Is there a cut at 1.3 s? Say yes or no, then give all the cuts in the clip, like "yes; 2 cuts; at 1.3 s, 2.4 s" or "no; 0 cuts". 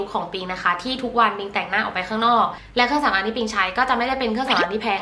no; 1 cut; at 2.6 s